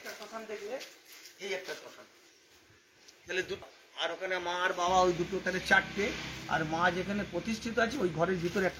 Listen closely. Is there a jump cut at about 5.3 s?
no; 0 cuts

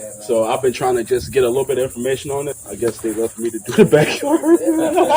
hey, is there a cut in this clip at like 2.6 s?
yes; 1 cut; at 2.6 s

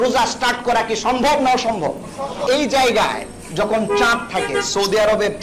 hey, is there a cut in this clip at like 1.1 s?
no; 1 cut; at 2.4 s

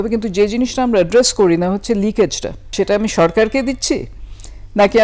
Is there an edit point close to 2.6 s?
yes; 1 cut; at 2.6 s

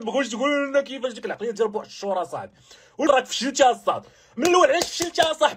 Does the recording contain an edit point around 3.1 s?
yes; 1 cut; at 3.1 s

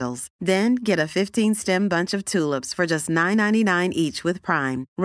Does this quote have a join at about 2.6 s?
no; 0 cuts

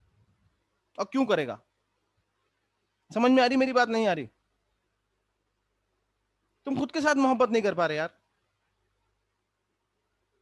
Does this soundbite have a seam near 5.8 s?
no; 0 cuts

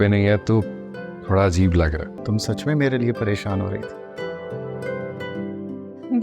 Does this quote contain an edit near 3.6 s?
no; 2 cuts; at 2.1 s, 5.2 s

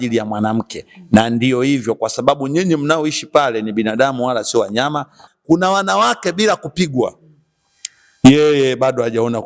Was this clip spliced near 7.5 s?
no; 1 cut; at 5.3 s

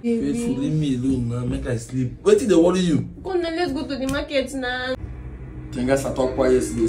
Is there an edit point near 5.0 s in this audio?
yes; 1 cut; at 5.0 s

